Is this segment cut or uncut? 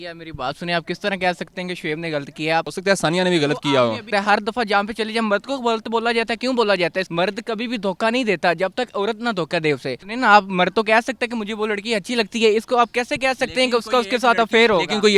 cut